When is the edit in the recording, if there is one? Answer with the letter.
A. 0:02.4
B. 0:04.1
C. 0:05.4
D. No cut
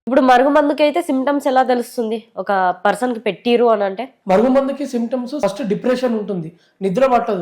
C